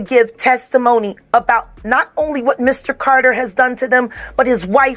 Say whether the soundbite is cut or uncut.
uncut